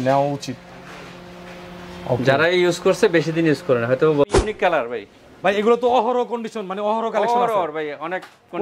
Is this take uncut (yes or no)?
no